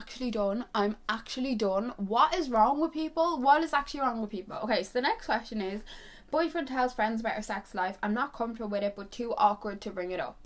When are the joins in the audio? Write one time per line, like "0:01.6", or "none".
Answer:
none